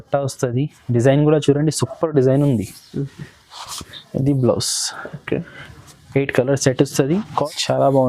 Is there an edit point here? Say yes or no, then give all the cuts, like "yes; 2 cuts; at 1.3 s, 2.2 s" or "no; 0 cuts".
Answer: yes; 2 cuts; at 4.0 s, 7.1 s